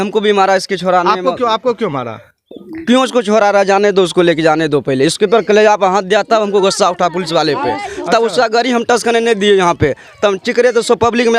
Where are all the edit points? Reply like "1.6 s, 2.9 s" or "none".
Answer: none